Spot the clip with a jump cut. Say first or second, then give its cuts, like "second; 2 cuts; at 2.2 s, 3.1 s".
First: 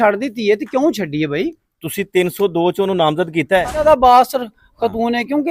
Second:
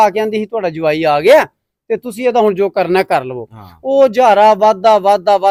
first; 1 cut; at 3.7 s